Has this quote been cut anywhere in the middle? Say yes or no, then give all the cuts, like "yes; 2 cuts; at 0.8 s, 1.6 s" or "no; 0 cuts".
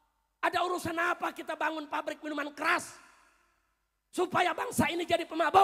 no; 0 cuts